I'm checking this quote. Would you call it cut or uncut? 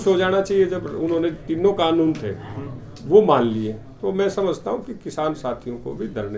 uncut